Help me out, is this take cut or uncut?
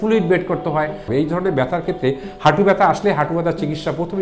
cut